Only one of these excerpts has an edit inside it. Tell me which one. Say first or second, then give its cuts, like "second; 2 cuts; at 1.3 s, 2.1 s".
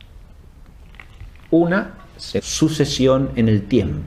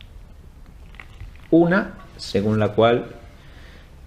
second; 1 cut; at 2.4 s